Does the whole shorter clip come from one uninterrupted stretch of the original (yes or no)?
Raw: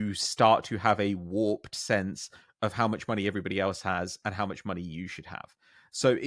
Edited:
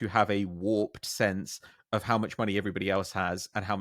yes